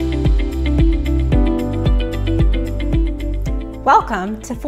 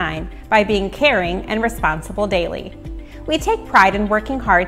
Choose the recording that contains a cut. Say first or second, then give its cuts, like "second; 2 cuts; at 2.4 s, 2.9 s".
first; 1 cut; at 1.6 s